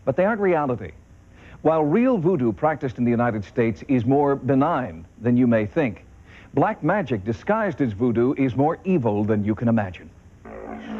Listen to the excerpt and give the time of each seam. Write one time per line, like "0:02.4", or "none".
0:07.7